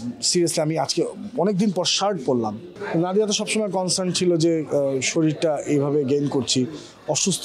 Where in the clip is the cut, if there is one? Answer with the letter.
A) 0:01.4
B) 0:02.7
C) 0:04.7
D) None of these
B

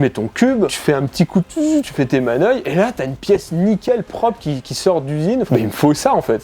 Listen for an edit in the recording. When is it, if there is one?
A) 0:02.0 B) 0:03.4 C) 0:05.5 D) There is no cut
C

